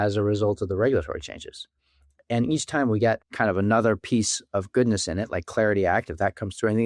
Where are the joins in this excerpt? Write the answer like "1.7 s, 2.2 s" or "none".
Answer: 3.3 s